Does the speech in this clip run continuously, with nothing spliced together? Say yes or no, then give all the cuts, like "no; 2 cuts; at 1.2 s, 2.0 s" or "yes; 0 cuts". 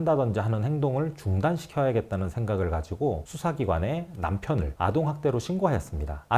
yes; 0 cuts